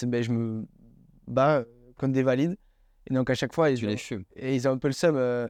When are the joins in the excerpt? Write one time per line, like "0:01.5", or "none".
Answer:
none